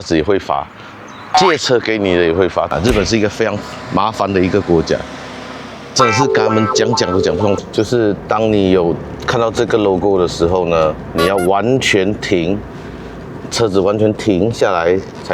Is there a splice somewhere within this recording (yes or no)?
yes